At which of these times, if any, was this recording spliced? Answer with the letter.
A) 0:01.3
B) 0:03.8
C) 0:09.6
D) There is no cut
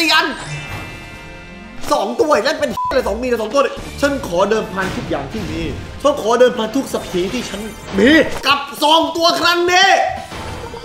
B